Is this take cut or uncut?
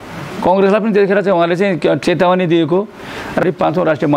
cut